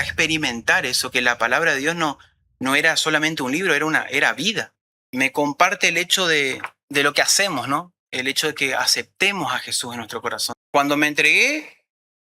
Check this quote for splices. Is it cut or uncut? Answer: cut